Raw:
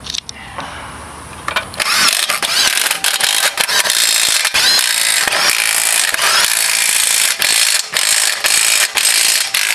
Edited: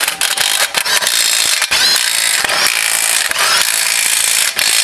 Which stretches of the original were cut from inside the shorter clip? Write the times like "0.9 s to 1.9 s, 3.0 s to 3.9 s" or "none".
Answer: none